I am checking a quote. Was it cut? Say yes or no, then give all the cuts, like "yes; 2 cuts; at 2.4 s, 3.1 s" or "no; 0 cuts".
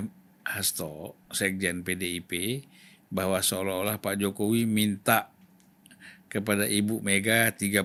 no; 0 cuts